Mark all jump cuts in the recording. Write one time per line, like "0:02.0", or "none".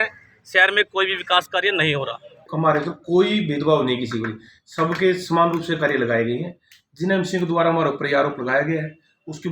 0:02.5